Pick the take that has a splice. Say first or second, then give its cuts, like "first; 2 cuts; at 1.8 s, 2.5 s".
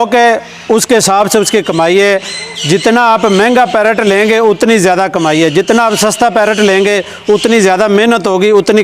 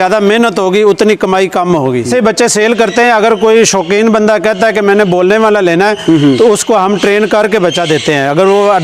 second; 1 cut; at 2.1 s